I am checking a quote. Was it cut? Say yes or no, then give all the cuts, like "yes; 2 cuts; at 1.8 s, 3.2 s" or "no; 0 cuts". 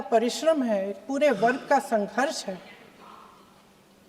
no; 0 cuts